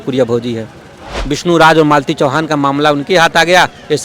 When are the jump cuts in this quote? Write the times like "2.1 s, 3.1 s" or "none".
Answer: 1.3 s